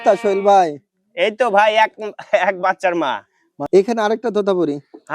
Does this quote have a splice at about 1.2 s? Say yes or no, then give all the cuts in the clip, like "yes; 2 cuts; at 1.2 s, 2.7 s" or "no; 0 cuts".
no; 1 cut; at 3.6 s